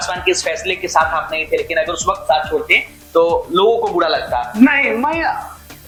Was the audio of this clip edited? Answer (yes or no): no